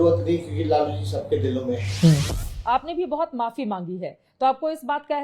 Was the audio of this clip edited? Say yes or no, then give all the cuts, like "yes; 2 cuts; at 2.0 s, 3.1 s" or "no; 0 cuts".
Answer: yes; 1 cut; at 2.5 s